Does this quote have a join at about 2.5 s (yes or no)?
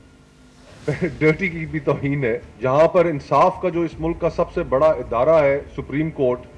yes